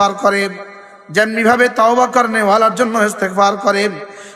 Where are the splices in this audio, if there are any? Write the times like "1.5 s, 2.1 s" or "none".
none

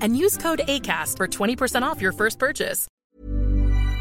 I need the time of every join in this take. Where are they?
2.8 s

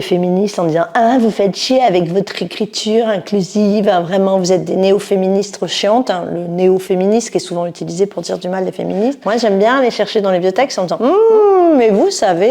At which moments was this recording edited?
none

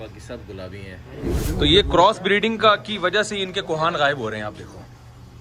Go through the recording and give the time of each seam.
1.4 s

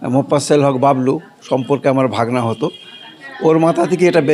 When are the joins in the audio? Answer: none

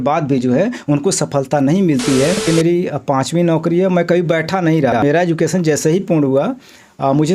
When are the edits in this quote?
2.5 s, 5.0 s

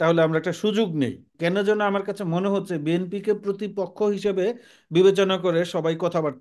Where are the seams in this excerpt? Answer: 1.3 s

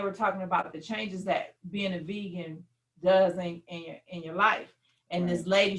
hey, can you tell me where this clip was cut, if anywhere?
none

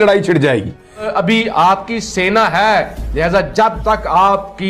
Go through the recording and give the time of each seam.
1.1 s

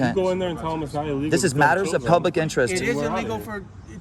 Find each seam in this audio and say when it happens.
none

